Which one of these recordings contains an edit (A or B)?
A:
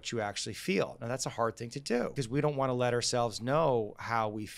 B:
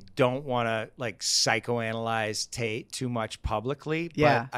A